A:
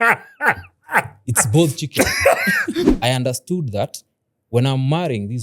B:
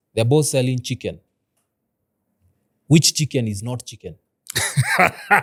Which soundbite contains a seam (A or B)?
A